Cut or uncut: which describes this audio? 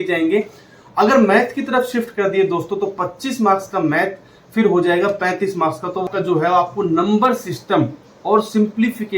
cut